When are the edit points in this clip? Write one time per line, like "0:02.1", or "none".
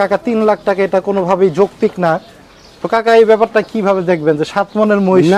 none

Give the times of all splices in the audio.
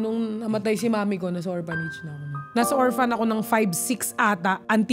0:02.5

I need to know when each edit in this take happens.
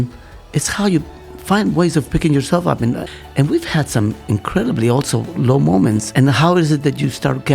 0:03.0
0:06.1

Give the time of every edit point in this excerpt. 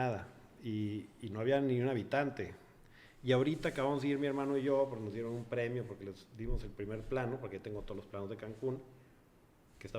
none

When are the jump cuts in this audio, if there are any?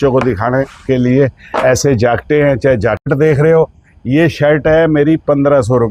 0:03.1

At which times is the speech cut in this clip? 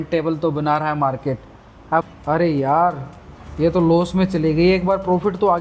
0:02.1

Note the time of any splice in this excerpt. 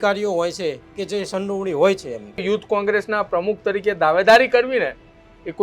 0:02.4

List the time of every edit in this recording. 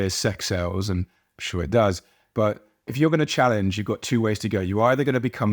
0:02.9

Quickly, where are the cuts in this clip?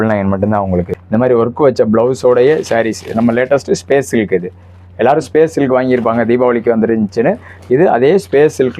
0:00.9

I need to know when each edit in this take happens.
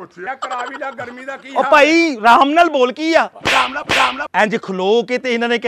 0:04.2

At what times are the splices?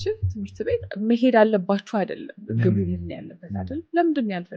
0:00.9
0:02.3

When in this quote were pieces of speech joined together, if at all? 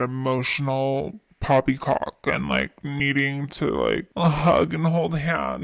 none

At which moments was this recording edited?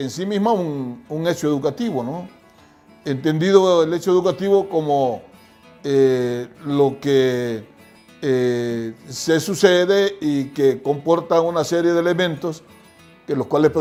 none

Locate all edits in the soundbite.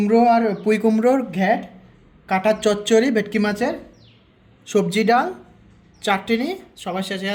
none

